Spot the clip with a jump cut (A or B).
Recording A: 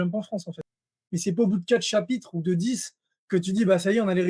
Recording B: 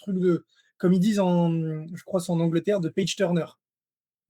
A